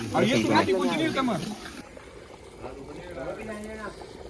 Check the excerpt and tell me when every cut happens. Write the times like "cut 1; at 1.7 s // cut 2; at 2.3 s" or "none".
cut 1; at 1.9 s